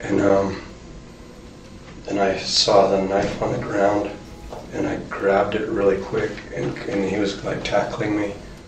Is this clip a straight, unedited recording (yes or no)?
yes